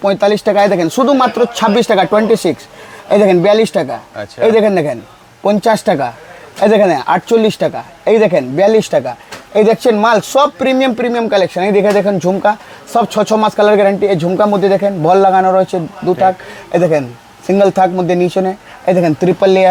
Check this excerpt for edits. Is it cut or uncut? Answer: uncut